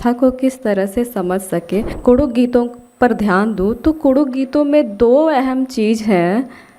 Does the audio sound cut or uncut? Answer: cut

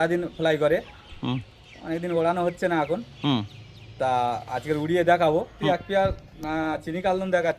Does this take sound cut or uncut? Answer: cut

